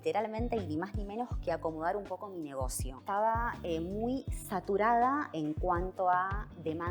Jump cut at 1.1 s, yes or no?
no